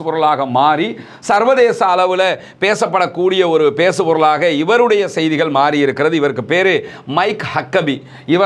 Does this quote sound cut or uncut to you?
uncut